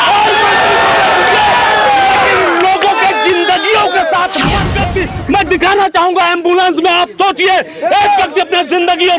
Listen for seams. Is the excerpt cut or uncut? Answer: cut